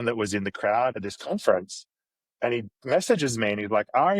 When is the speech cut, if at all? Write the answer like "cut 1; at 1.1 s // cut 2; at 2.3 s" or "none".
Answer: cut 1; at 1.0 s